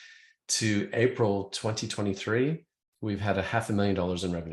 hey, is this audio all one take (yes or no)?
yes